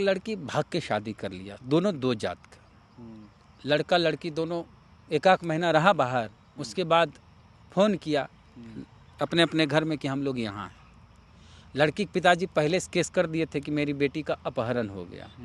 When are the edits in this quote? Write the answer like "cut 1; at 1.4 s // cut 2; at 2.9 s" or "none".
none